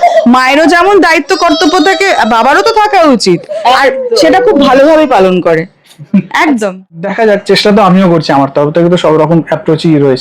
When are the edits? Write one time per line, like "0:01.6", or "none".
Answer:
0:06.8